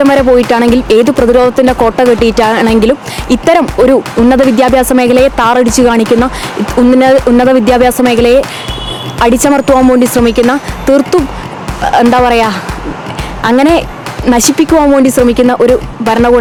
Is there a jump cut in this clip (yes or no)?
no